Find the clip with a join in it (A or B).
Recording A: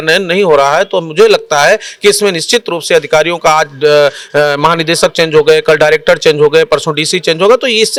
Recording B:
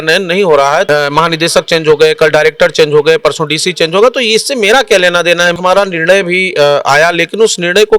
B